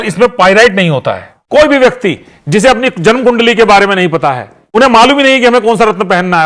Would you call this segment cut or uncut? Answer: cut